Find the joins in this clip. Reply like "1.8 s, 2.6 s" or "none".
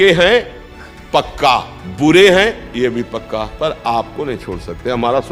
1.8 s, 3.5 s